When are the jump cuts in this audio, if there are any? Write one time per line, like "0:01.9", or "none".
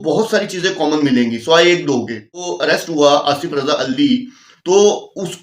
0:02.5